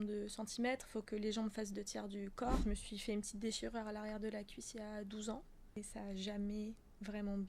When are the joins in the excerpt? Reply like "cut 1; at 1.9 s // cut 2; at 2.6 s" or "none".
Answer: cut 1; at 2.6 s // cut 2; at 5.8 s